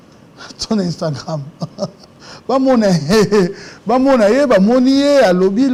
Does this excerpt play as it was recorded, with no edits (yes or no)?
yes